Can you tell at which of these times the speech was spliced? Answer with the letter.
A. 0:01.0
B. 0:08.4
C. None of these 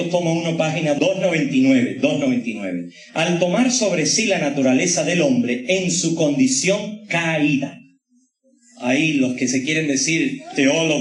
A